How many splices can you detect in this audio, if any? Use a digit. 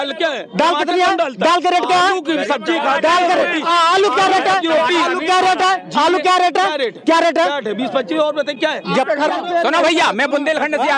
1